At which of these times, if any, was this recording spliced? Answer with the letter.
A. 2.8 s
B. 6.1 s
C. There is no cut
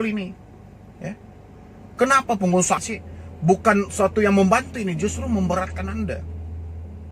A